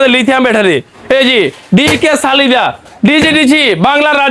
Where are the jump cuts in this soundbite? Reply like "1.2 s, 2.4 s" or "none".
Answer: 2.8 s